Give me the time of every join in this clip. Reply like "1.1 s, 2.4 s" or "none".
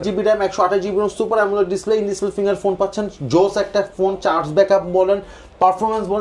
none